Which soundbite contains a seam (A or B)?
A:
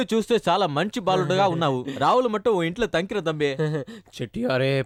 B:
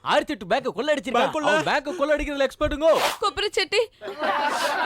B